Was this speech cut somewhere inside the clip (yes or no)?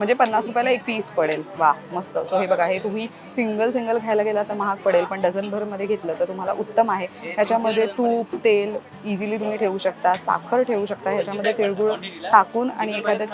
no